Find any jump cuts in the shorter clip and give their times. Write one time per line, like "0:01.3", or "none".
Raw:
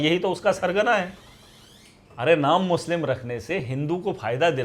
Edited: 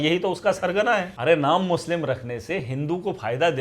0:01.1